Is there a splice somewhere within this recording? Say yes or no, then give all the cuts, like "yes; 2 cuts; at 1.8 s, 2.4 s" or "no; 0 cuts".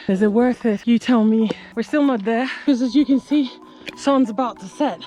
yes; 3 cuts; at 0.8 s, 1.7 s, 2.5 s